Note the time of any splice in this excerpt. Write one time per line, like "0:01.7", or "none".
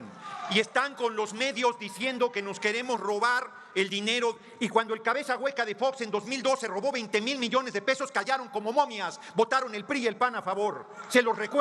0:02.3